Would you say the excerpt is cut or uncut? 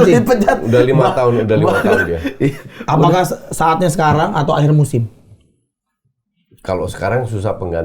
uncut